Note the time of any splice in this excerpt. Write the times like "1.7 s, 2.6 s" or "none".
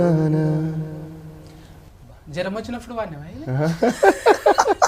none